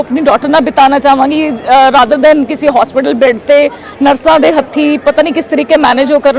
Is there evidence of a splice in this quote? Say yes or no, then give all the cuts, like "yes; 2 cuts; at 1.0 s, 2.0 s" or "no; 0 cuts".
no; 0 cuts